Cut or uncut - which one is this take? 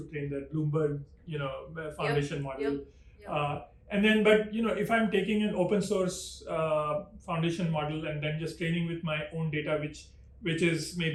uncut